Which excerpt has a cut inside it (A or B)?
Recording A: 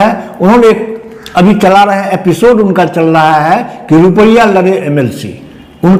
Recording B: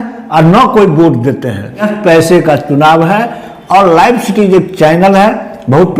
B